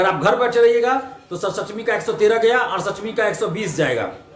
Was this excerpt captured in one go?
yes; 0 cuts

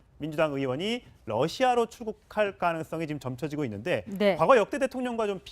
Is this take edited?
yes; 1 cut; at 2.0 s

